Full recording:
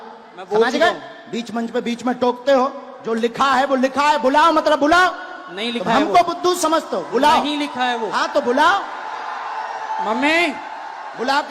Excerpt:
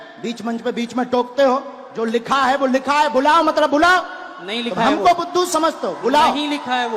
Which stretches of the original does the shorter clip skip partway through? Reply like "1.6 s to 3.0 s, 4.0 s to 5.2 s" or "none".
none